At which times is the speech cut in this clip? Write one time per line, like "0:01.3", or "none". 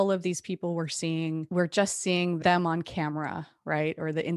0:01.5
0:02.4